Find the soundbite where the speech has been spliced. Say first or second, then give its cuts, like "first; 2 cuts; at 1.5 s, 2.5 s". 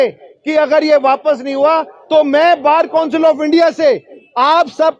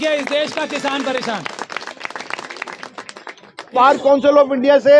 second; 1 cut; at 3.7 s